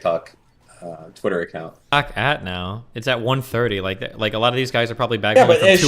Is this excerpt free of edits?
no; 1 cut; at 1.9 s

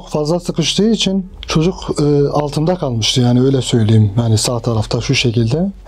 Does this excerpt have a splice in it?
yes; 1 cut; at 1.3 s

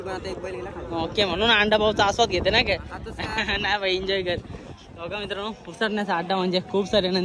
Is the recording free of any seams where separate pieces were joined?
yes; 0 cuts

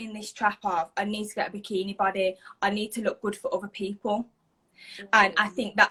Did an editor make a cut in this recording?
no; 0 cuts

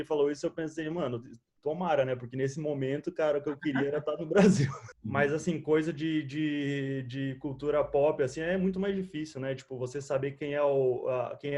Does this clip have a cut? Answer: yes; 1 cut; at 4.8 s

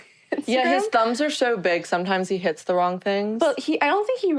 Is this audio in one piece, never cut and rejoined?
yes; 0 cuts

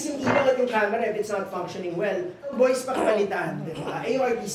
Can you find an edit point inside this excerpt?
yes; 1 cut; at 2.5 s

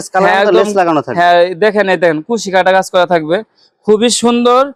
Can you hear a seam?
no; 0 cuts

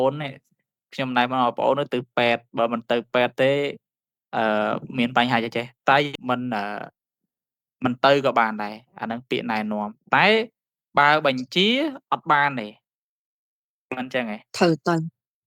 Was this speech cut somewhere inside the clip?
yes; 1 cut; at 6.1 s

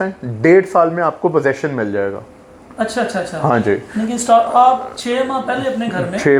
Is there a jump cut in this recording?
no; 0 cuts

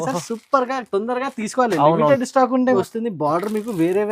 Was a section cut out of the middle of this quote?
yes; 1 cut; at 2.8 s

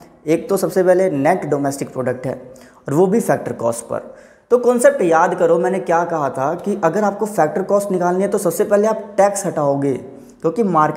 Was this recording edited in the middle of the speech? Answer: no; 0 cuts

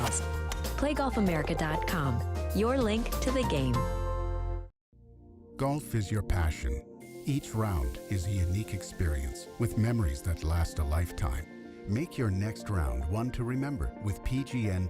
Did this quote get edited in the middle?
yes; 1 cut; at 4.8 s

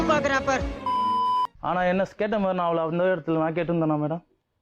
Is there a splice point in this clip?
no; 0 cuts

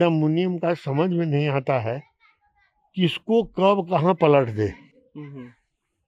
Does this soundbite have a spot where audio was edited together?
no; 0 cuts

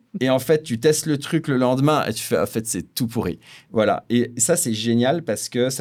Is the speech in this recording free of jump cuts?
yes; 0 cuts

